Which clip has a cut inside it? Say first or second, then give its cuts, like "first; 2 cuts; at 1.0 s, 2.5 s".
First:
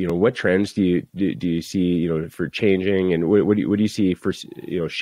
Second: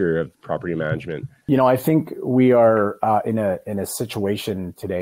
second; 1 cut; at 1.8 s